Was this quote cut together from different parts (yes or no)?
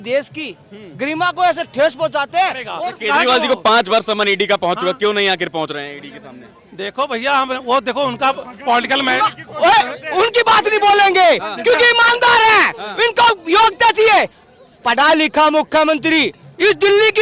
yes